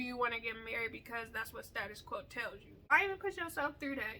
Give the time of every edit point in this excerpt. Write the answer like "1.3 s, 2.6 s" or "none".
2.8 s